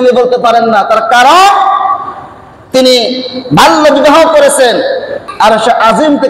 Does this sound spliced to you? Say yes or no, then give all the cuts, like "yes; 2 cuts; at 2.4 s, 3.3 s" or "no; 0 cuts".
yes; 1 cut; at 5.2 s